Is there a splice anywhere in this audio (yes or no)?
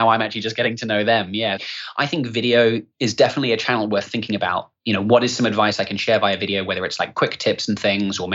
yes